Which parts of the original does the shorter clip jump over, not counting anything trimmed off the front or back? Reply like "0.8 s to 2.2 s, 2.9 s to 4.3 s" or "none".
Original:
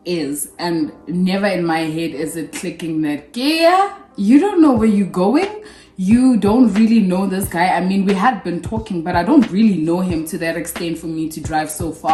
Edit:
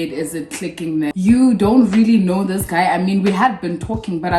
3.1 s to 6.0 s